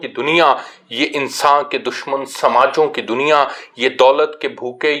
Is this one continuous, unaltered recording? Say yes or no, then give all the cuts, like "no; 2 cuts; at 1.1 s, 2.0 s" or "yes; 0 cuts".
yes; 0 cuts